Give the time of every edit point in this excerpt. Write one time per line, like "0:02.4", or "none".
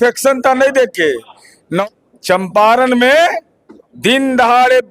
0:01.8